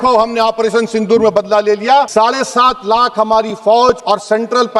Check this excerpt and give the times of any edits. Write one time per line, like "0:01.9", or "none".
0:02.1
0:04.0